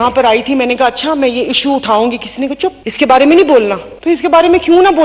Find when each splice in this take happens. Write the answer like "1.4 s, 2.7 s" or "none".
2.8 s, 3.9 s